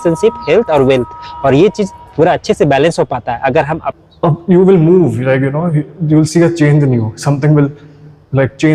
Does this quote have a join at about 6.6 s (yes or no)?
no